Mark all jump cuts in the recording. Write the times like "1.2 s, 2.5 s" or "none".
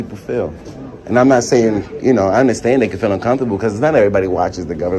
none

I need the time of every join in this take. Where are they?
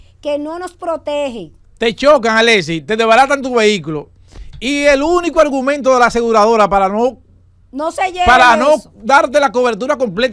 none

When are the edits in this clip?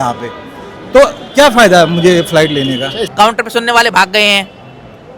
3.0 s

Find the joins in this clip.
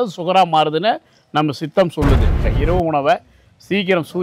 2.5 s

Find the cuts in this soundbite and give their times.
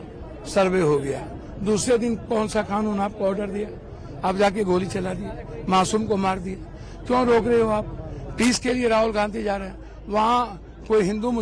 none

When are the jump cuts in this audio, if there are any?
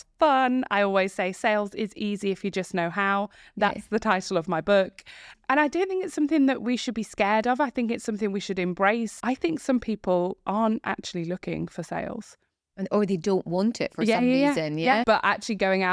9.1 s, 15.0 s

